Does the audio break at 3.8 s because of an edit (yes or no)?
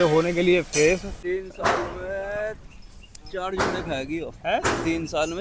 no